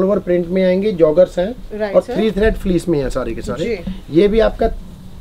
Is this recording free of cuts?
yes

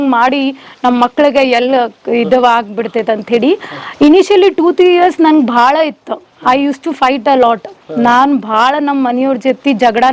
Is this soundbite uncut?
yes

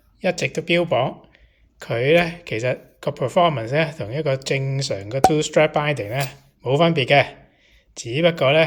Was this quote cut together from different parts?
no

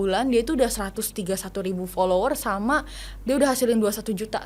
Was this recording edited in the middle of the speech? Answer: no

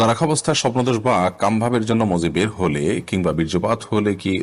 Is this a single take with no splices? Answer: yes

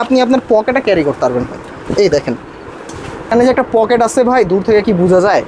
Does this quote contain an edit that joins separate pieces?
yes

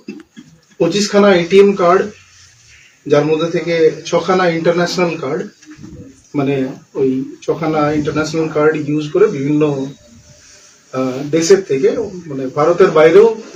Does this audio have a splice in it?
no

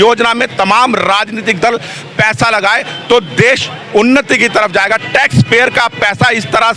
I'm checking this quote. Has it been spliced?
no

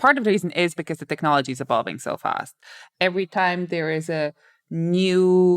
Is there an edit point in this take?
yes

